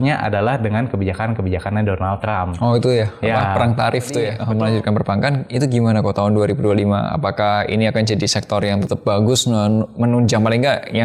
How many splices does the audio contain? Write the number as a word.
two